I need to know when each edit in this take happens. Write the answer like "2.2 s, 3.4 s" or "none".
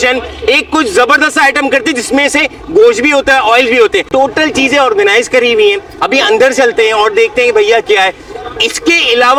none

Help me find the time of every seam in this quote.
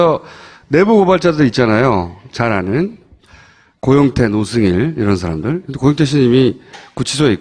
none

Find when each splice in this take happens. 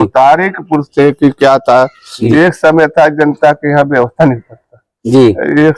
2.3 s

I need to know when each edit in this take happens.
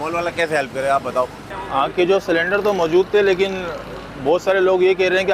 1.5 s

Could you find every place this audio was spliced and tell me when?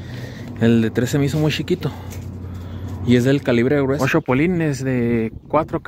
4.0 s

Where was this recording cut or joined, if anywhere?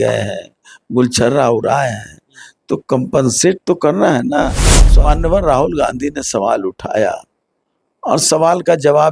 4.8 s

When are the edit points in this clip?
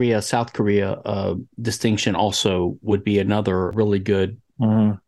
3.7 s

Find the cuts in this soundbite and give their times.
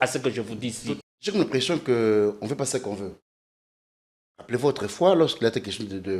1.0 s

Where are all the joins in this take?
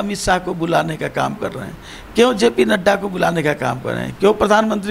none

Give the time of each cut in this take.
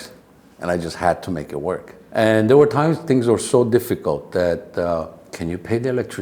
2.0 s, 5.2 s

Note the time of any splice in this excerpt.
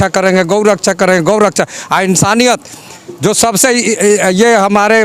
none

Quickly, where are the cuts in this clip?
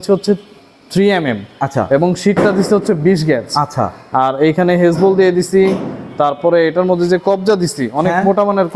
none

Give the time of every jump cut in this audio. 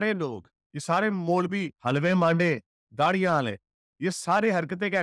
none

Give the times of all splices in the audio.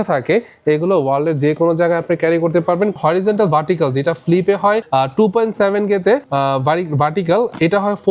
3.0 s, 4.8 s, 6.3 s

